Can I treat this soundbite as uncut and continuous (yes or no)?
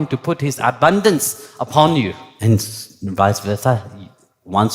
no